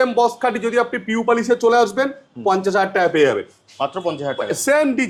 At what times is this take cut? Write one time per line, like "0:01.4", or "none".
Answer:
none